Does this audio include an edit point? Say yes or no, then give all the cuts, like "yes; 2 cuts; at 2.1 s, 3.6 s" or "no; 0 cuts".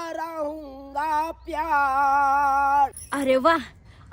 yes; 1 cut; at 3.0 s